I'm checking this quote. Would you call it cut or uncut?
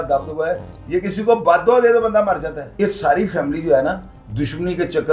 cut